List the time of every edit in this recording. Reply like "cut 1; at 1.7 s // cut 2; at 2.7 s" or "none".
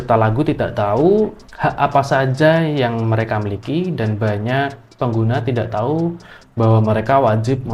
cut 1; at 1.4 s

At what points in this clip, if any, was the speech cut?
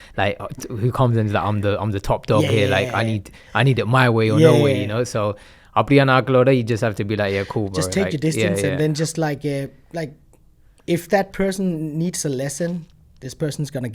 none

